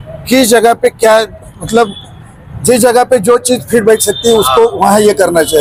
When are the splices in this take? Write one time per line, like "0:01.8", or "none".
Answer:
none